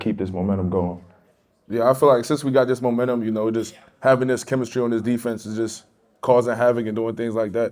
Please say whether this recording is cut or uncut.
uncut